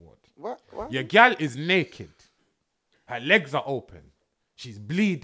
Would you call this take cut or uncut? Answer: uncut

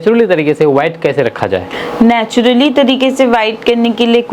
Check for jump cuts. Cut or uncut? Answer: uncut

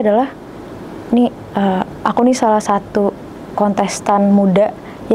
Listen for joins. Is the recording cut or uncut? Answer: uncut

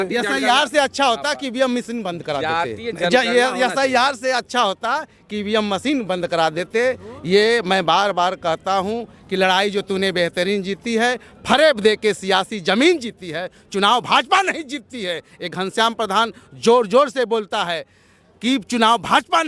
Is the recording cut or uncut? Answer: uncut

